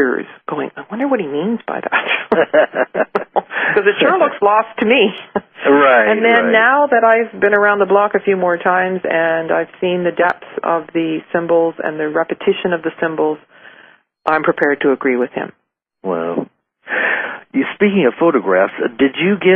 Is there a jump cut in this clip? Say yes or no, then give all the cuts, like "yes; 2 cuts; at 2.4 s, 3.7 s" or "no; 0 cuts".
no; 0 cuts